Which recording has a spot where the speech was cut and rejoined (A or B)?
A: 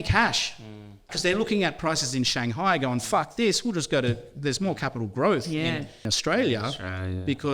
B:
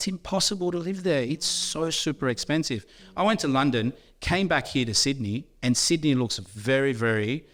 A